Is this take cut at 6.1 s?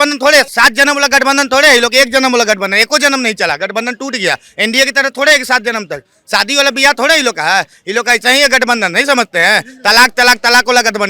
no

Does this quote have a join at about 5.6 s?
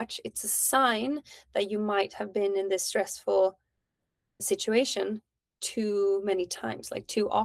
no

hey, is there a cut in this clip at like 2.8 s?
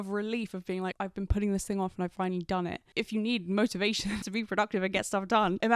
no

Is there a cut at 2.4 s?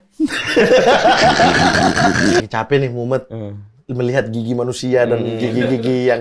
yes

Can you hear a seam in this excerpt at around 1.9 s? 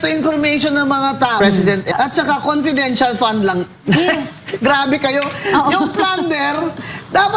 yes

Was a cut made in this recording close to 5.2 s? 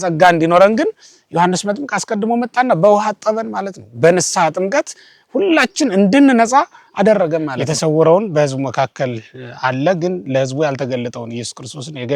no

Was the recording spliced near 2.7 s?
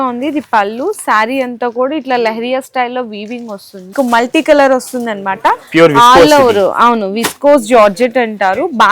no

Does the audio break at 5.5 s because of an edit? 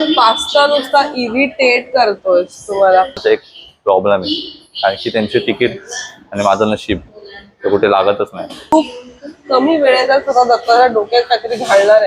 no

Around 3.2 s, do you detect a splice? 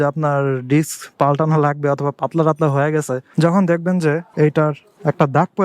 yes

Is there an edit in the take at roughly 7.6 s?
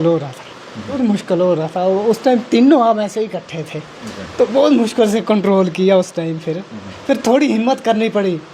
no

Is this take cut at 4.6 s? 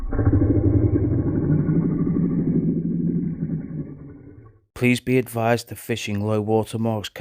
yes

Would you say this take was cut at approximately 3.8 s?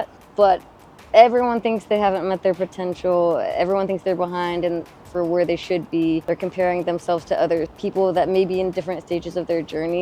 no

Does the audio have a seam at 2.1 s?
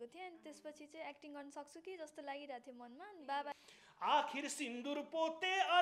no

